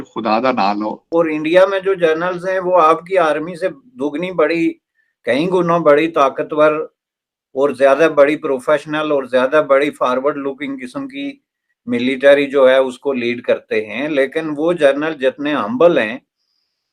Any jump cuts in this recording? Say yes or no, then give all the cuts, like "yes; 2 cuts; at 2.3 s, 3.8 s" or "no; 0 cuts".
yes; 1 cut; at 1.0 s